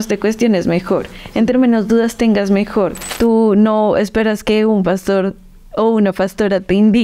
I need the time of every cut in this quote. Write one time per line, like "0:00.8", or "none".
0:03.1

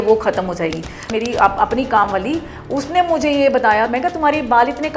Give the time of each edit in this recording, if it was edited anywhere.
0:01.1
0:03.9

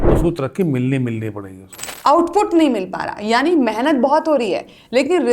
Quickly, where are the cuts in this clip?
0:01.9

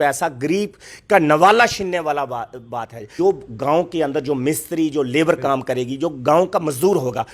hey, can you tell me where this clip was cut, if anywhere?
0:03.0

